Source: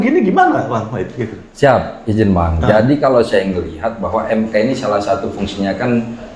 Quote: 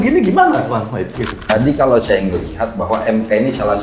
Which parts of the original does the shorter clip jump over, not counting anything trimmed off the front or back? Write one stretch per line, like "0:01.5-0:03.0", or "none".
0:01.5-0:02.7